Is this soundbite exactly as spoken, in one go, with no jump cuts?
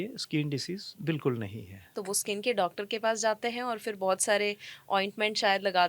no; 1 cut; at 2.0 s

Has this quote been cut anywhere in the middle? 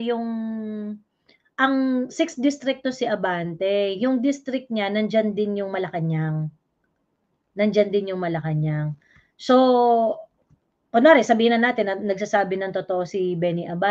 no; 0 cuts

